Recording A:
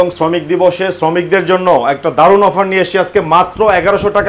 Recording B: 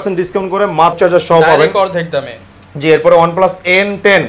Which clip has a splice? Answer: B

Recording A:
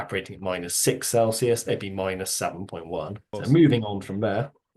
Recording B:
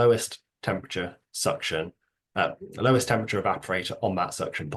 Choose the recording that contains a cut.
A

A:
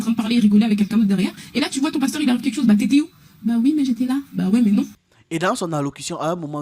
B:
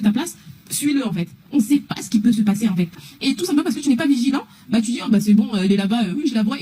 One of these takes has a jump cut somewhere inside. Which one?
A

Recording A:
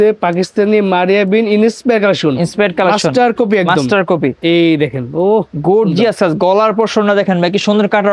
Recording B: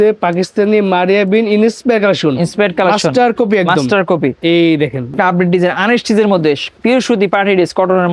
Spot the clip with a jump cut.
B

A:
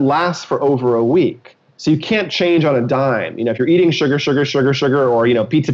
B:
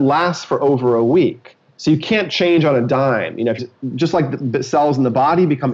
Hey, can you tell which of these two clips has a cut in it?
B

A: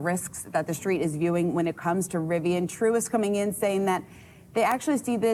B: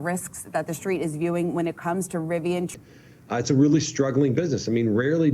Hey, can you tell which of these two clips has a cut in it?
B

